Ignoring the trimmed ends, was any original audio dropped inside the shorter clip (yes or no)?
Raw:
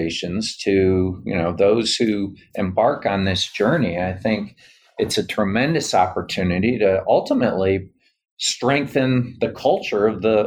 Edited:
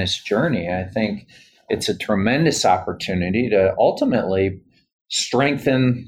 no